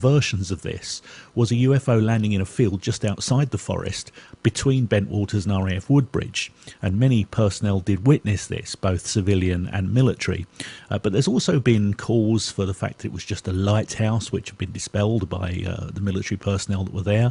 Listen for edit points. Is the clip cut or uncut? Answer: cut